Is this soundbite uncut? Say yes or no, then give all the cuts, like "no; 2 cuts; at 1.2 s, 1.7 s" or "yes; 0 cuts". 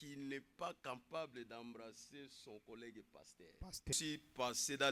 no; 1 cut; at 4.0 s